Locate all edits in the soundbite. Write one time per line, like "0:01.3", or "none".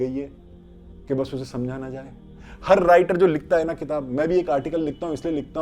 none